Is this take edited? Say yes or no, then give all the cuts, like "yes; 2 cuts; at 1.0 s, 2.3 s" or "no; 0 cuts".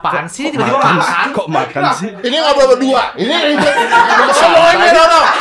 yes; 1 cut; at 2.2 s